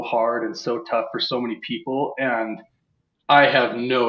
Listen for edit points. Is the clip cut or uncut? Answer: uncut